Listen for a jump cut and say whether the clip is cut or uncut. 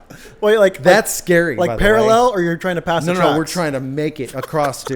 uncut